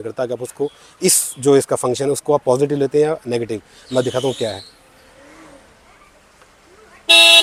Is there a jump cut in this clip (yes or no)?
no